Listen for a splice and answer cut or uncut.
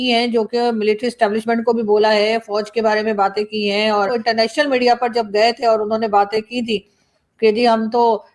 cut